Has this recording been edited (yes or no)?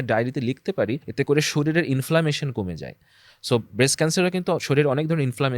yes